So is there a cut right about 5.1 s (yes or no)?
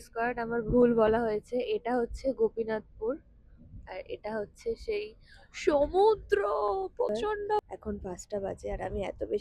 no